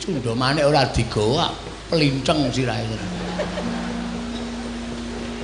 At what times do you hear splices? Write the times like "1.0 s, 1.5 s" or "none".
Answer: 3.2 s